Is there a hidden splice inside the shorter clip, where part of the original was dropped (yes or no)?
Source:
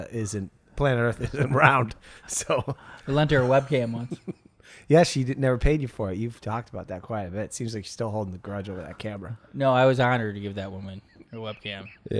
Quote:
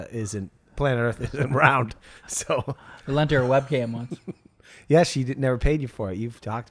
no